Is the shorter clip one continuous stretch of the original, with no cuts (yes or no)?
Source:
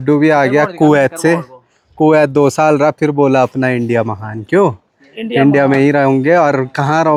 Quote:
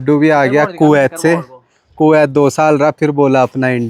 yes